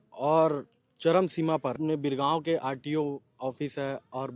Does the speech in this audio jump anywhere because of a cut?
yes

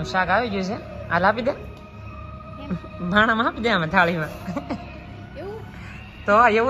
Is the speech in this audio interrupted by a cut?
no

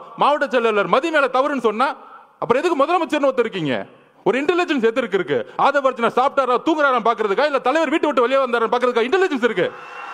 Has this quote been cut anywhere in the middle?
no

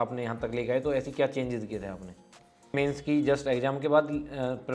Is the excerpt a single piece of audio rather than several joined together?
no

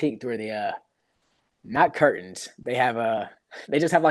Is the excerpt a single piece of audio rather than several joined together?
yes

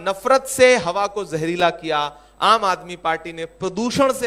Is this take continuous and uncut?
yes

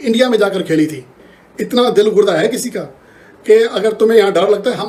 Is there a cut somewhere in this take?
no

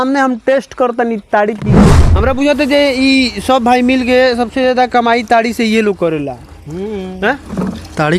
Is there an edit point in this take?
yes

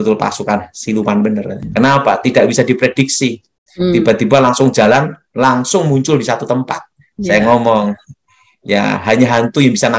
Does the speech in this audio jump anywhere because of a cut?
yes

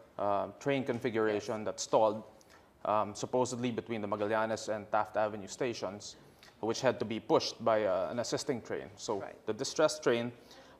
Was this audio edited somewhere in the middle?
no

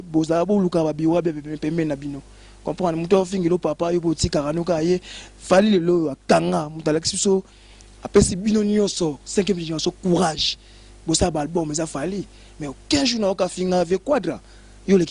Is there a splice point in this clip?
no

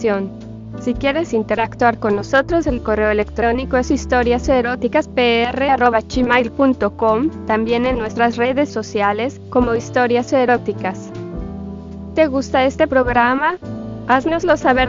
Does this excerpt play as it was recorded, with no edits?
yes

